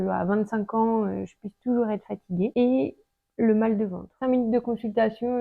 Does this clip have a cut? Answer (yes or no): yes